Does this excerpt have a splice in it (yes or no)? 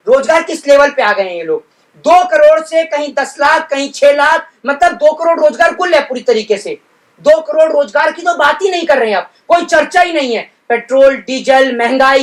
no